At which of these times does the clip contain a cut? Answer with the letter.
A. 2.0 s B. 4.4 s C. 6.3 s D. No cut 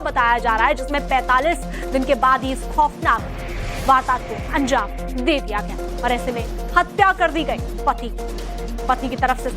A